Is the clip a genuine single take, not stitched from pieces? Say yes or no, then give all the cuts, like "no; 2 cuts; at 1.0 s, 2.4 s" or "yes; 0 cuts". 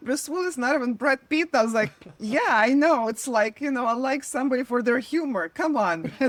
yes; 0 cuts